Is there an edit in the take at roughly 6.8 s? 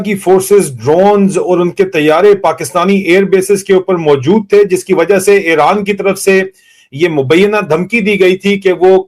no; 0 cuts

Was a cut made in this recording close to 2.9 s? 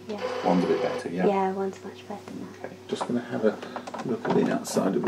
yes; 1 cut; at 2.9 s

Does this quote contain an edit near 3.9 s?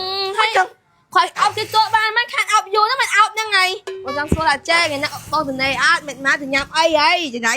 yes; 1 cut; at 3.9 s

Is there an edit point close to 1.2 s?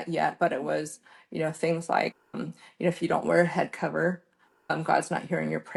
no; 0 cuts

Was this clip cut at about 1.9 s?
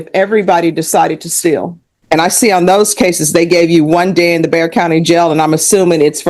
yes; 1 cut; at 1.9 s

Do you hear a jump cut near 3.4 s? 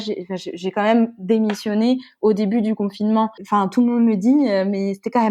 yes; 1 cut; at 3.4 s

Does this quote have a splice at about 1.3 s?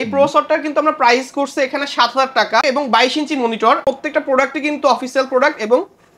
no; 2 cuts; at 2.6 s, 3.8 s

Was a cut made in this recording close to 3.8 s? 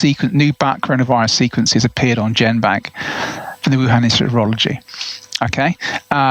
no; 0 cuts

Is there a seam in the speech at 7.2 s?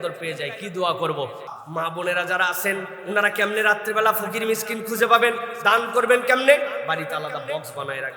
no; 1 cut; at 1.5 s

